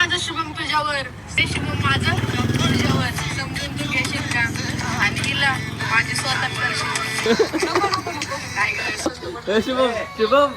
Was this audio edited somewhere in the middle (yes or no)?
yes